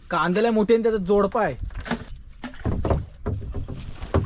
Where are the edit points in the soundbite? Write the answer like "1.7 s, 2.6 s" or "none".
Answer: 2.1 s